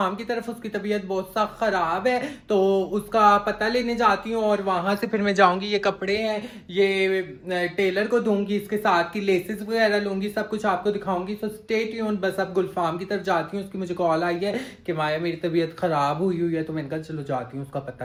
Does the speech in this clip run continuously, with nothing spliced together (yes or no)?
yes